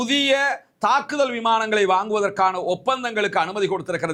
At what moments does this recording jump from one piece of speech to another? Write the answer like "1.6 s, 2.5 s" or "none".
none